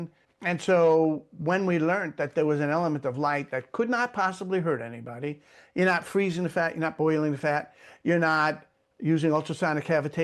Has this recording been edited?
no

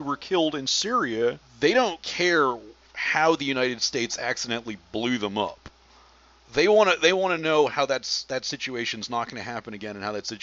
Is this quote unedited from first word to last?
no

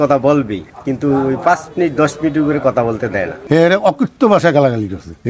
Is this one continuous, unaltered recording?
no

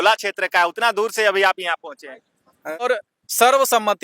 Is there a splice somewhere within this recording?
yes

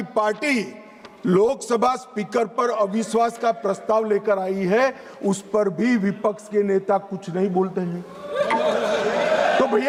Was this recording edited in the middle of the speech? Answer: no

